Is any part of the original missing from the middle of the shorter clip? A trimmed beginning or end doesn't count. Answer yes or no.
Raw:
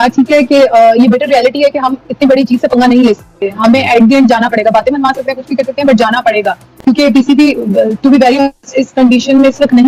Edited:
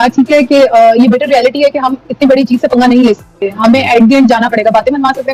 no